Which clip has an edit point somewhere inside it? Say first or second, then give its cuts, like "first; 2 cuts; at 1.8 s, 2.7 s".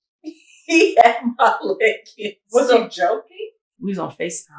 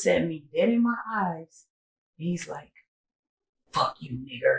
first; 1 cut; at 3.6 s